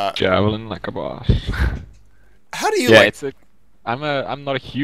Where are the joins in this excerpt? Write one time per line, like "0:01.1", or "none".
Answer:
none